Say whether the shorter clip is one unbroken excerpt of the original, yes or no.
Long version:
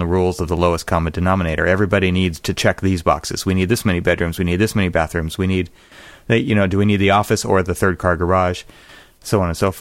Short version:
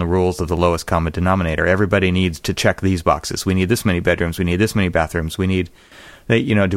yes